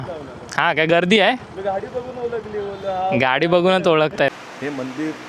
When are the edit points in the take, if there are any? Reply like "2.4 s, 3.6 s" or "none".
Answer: 4.3 s